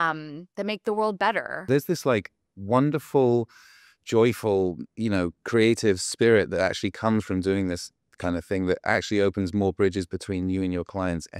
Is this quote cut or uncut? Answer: cut